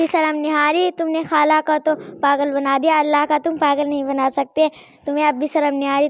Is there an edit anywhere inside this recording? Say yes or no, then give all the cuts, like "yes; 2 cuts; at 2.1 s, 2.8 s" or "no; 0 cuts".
no; 0 cuts